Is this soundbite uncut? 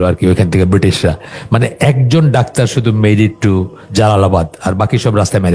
yes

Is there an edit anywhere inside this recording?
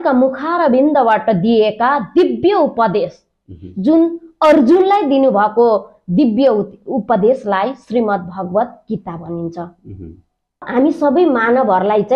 yes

